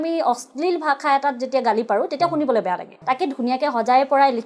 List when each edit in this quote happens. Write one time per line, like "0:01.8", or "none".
0:02.9